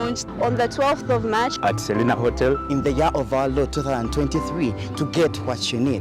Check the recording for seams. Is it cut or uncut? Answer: uncut